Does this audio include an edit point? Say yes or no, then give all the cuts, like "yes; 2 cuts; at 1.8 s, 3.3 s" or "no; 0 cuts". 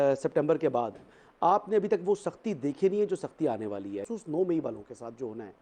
yes; 1 cut; at 4.1 s